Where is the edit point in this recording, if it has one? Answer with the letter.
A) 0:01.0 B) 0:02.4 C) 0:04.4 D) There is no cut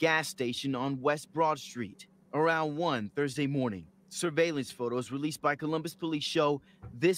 A